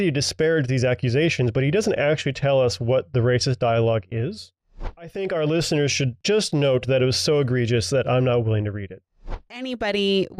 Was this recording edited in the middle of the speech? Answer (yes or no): yes